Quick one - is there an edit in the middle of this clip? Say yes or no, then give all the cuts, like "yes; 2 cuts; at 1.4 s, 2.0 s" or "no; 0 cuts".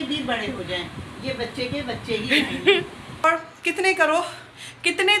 yes; 1 cut; at 3.2 s